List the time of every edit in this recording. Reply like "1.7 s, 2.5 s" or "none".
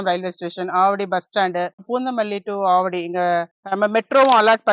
1.8 s